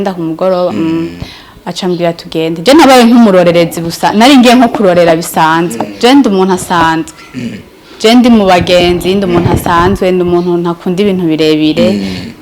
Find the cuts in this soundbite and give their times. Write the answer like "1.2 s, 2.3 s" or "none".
5.9 s